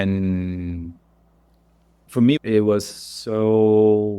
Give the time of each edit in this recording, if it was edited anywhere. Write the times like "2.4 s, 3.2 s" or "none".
2.0 s